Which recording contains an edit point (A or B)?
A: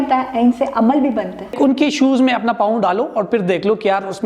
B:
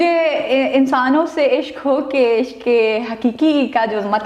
A